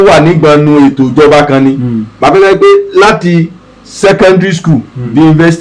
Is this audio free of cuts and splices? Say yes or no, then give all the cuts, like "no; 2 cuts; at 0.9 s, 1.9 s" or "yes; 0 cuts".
yes; 0 cuts